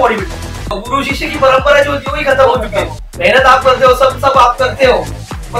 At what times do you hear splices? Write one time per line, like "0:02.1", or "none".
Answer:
0:00.8
0:03.0